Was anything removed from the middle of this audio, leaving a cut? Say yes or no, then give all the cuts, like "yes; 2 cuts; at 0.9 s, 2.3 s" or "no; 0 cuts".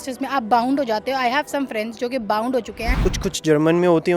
yes; 1 cut; at 3.0 s